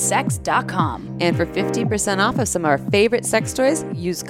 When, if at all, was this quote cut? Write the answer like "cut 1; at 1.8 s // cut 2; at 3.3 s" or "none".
none